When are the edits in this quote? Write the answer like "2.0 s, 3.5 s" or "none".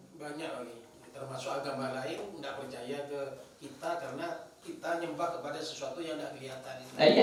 none